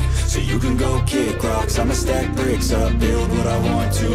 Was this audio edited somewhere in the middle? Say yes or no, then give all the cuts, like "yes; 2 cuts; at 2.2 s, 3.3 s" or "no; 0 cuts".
no; 0 cuts